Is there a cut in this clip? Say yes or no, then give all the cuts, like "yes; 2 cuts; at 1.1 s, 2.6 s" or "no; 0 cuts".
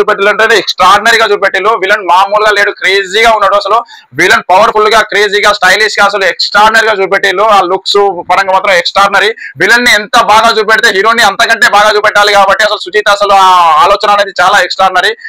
no; 0 cuts